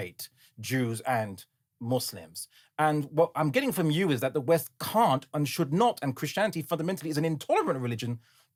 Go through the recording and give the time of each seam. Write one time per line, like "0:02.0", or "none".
none